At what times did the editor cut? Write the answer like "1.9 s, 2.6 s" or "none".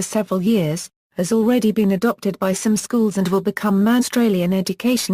none